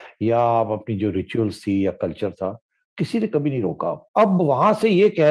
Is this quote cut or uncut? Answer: cut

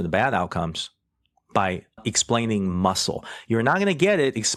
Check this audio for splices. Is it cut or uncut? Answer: uncut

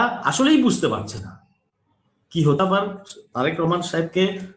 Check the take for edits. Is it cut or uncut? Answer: cut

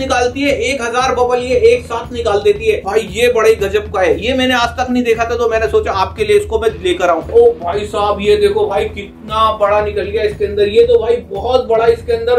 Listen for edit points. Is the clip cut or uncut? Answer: cut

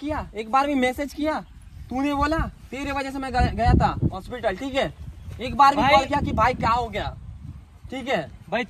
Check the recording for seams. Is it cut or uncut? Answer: uncut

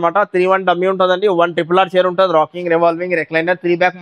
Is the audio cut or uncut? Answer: uncut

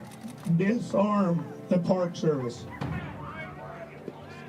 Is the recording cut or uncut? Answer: cut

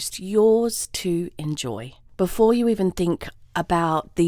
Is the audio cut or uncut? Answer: cut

